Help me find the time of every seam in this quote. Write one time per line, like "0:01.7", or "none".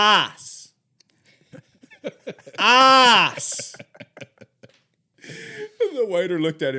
0:05.1

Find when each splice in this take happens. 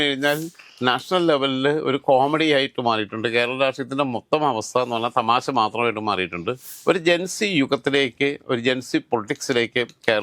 0:06.7

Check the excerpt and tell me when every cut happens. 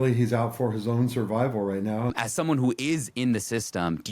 0:02.1

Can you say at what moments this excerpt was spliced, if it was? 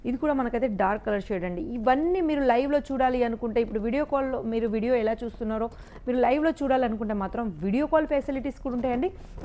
none

